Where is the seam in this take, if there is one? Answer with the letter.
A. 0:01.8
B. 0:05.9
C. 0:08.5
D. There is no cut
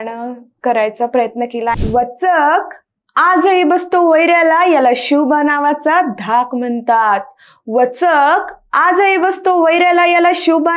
A